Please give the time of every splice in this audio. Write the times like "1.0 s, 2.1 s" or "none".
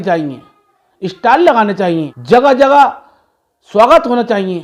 2.1 s